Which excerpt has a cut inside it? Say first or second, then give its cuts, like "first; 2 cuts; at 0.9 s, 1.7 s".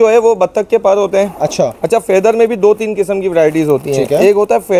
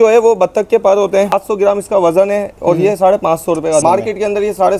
second; 2 cuts; at 1.4 s, 3.8 s